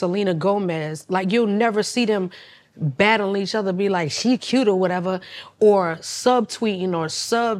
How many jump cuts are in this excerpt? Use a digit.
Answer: 0